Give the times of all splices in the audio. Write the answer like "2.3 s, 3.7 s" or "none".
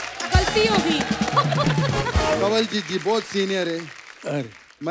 2.4 s